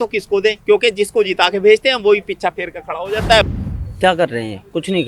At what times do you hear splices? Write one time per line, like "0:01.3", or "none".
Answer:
0:03.4